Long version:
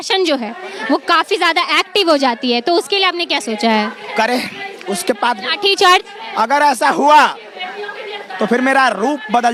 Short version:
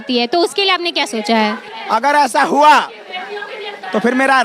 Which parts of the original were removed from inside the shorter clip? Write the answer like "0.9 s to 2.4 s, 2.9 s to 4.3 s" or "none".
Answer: 4.0 s to 6.1 s